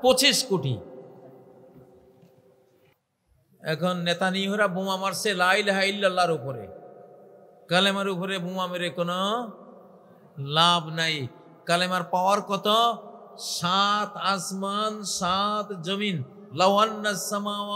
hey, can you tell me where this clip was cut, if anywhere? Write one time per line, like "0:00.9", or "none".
0:03.0